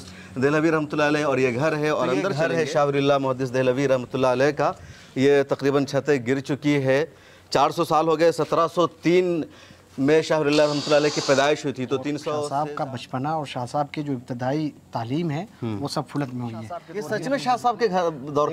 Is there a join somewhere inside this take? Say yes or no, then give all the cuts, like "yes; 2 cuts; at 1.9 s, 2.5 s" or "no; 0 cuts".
yes; 3 cuts; at 2.3 s, 12.4 s, 16.9 s